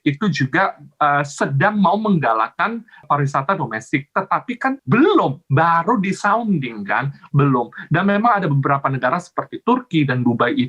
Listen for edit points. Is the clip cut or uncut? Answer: cut